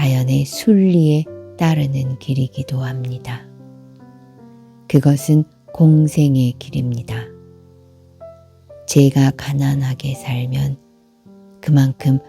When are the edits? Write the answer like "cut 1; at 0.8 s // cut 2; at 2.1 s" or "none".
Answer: cut 1; at 3.3 s // cut 2; at 4.9 s // cut 3; at 7.1 s // cut 4; at 8.9 s